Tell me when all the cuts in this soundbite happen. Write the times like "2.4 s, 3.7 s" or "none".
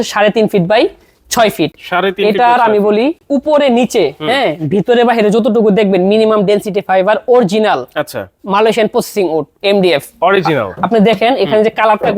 none